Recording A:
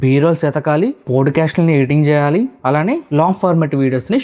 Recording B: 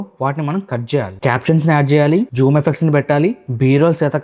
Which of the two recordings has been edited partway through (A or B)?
B